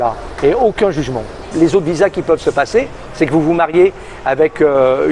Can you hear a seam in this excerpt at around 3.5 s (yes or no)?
no